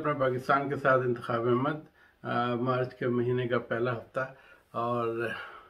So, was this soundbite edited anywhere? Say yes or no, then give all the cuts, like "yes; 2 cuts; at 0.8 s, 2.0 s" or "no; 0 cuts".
no; 0 cuts